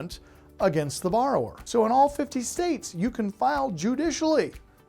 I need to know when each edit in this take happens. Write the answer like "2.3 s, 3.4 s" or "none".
1.6 s